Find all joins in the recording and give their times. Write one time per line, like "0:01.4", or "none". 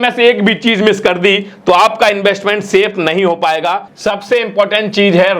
0:03.9

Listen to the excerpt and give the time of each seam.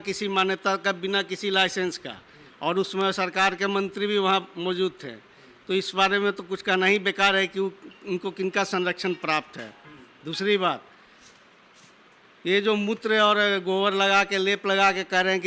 none

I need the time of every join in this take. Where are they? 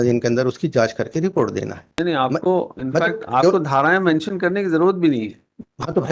0:01.8

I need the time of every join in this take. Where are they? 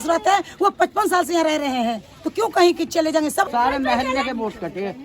0:03.5

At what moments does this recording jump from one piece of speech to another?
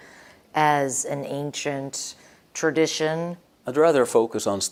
none

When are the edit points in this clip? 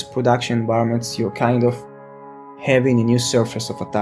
0:02.5

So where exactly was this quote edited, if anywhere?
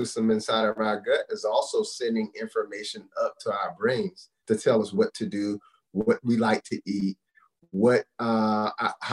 none

